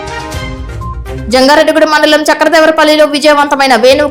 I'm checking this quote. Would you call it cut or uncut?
uncut